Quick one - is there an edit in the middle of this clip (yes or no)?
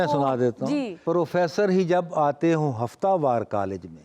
yes